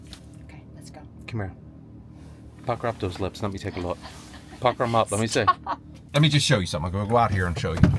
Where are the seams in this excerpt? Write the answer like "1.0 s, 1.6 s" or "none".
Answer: 5.9 s